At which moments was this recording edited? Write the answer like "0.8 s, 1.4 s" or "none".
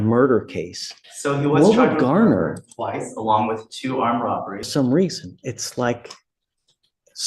4.7 s